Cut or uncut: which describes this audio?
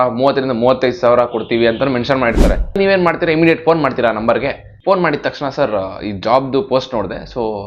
cut